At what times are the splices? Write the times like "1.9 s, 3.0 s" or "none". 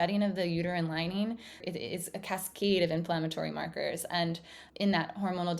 1.6 s, 4.6 s